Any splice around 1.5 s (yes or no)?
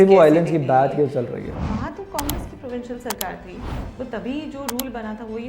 yes